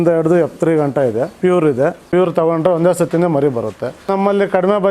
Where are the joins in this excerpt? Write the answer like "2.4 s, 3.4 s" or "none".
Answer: 1.3 s, 2.1 s, 4.1 s